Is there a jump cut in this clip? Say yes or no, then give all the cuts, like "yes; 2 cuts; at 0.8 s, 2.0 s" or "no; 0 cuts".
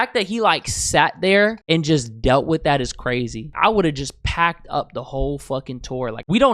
yes; 1 cut; at 3.5 s